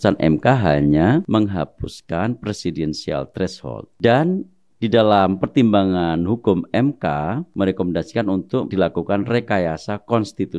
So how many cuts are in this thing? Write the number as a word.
four